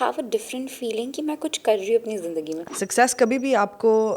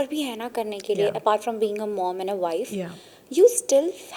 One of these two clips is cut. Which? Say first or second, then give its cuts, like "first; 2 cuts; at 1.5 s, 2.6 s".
first; 1 cut; at 2.6 s